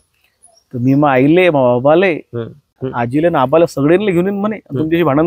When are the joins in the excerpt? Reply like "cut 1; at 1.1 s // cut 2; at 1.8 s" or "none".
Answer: cut 1; at 2.8 s

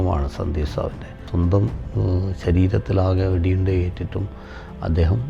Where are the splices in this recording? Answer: cut 1; at 1.2 s

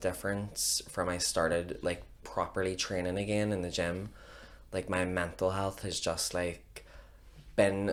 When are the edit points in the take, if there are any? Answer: none

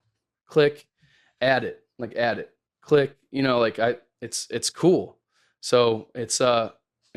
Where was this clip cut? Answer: none

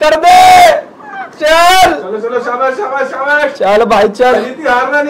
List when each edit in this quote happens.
none

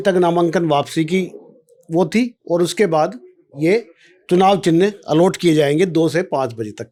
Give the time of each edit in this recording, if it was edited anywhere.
none

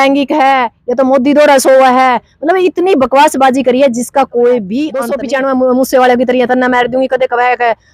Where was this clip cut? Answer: cut 1; at 5.0 s

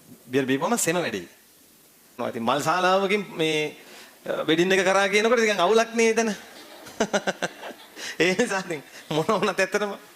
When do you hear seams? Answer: cut 1; at 2.2 s

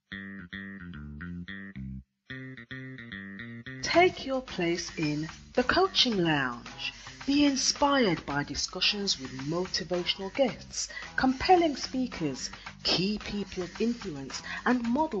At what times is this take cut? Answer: none

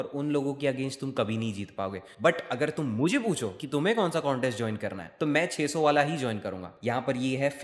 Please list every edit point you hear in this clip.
cut 1; at 2.1 s // cut 2; at 6.7 s

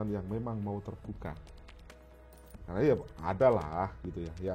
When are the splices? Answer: none

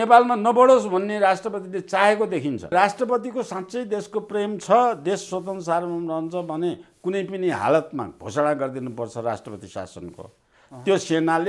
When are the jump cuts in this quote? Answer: cut 1; at 2.7 s

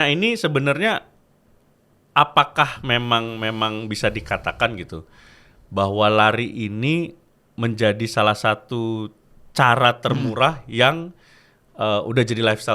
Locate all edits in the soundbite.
none

